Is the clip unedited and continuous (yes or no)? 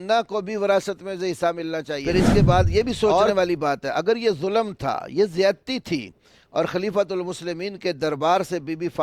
no